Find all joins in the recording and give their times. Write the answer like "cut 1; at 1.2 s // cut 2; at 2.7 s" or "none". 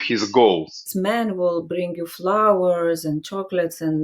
cut 1; at 0.9 s